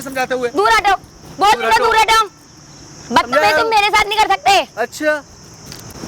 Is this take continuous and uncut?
yes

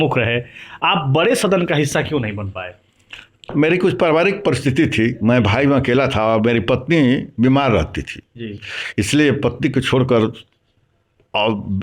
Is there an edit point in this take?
no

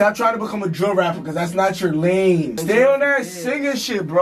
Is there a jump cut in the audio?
yes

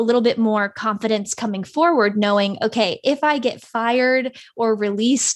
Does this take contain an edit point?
no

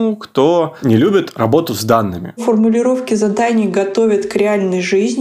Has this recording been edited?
yes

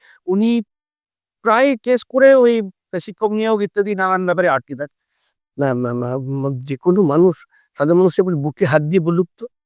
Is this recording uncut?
yes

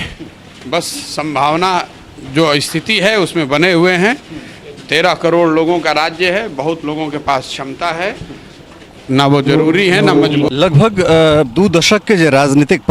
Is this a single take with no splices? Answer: no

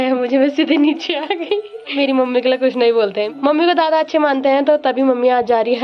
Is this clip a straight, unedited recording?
yes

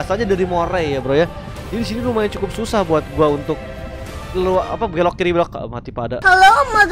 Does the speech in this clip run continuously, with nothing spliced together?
yes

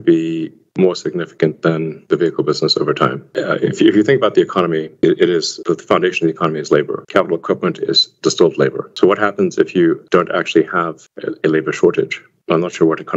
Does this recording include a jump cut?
no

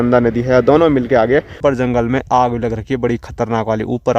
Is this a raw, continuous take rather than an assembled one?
no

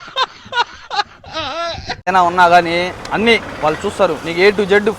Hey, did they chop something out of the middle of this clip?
yes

